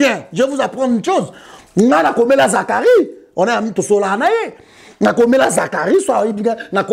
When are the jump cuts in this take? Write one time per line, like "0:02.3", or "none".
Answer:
none